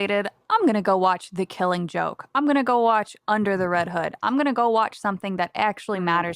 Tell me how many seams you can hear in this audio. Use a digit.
0